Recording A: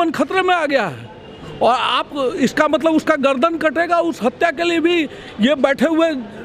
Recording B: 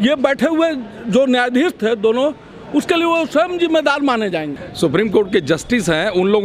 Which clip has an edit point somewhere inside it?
B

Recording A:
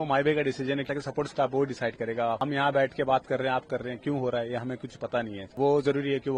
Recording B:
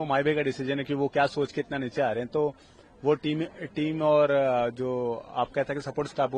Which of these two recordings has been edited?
A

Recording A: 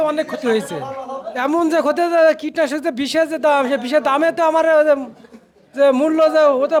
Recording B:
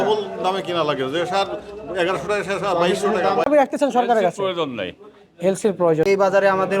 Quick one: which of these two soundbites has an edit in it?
B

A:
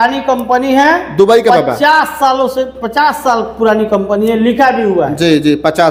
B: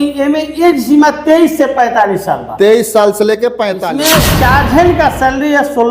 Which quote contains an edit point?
B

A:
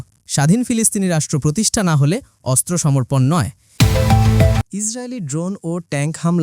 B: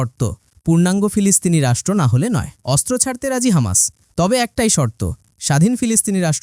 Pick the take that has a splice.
A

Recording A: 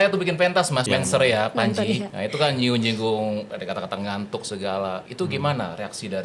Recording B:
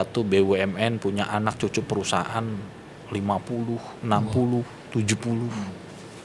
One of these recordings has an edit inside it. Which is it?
A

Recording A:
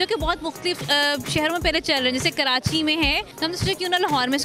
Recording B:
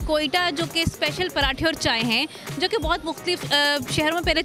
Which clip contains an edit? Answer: A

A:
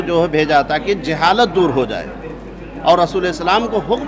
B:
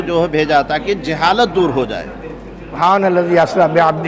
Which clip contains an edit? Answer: B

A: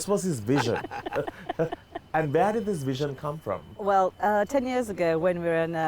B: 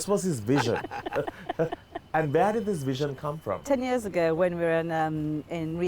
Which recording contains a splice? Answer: B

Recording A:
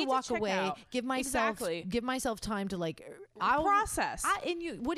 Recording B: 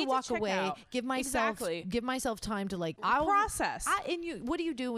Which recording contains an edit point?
B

